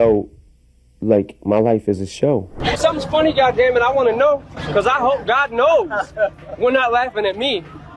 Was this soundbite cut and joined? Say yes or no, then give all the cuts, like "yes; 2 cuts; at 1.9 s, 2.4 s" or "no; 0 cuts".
yes; 1 cut; at 2.6 s